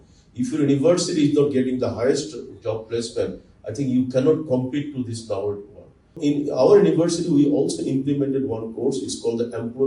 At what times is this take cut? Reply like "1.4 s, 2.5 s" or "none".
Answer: 6.2 s